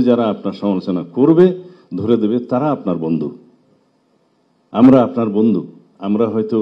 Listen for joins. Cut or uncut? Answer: uncut